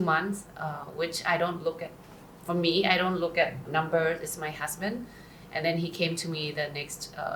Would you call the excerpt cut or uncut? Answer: cut